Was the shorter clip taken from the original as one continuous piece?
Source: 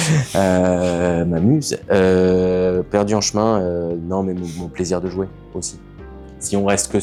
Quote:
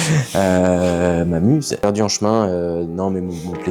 no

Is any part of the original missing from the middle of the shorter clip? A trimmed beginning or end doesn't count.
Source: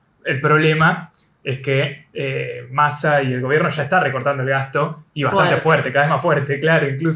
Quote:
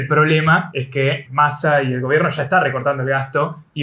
yes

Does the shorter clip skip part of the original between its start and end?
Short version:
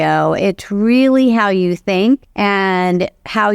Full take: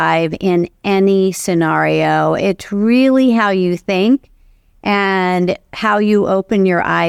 yes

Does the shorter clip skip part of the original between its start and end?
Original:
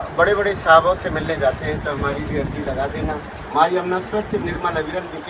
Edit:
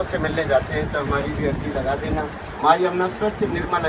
no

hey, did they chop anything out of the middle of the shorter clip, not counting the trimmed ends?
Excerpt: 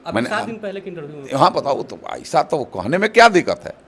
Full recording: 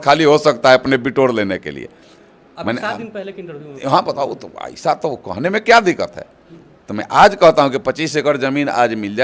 no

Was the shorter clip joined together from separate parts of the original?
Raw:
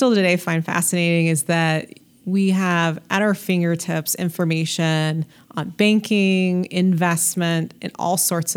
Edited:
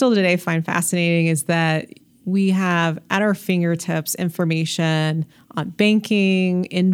no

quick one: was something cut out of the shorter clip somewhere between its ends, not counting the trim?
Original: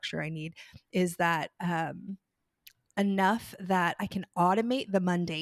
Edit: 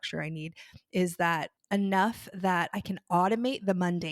yes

